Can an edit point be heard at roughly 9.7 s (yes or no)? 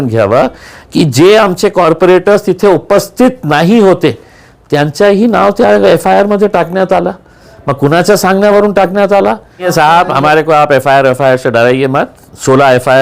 yes